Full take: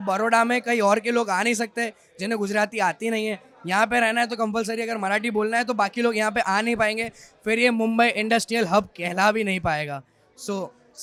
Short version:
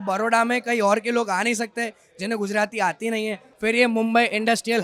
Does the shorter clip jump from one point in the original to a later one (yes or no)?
yes